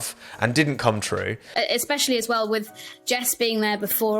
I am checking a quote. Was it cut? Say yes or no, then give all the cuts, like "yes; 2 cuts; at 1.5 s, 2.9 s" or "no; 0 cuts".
yes; 1 cut; at 1.5 s